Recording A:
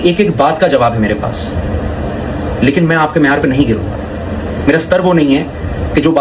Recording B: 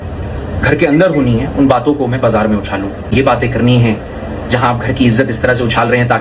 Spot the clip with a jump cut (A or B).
B